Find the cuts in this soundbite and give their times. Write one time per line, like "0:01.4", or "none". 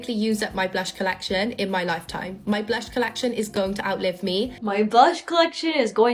none